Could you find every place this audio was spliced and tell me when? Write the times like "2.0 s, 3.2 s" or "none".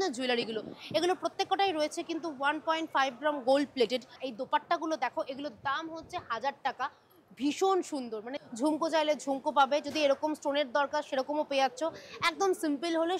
4.2 s, 8.3 s